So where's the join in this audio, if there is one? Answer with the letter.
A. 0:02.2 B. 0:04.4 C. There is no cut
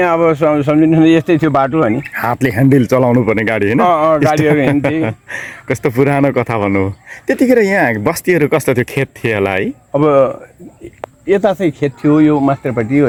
C